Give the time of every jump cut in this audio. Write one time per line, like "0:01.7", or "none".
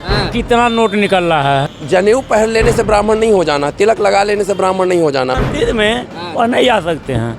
0:01.8
0:05.4